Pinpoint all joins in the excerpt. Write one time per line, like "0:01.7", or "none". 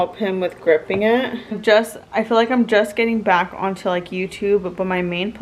0:01.6